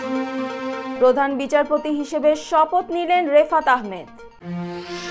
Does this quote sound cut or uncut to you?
uncut